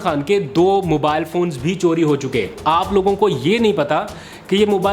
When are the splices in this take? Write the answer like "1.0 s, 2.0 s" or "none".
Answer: 2.6 s